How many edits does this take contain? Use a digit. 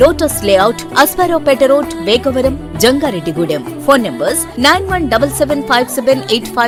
0